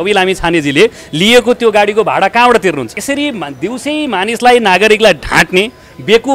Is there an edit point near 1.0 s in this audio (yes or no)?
no